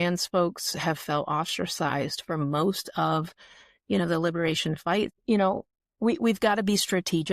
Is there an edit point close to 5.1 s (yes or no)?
yes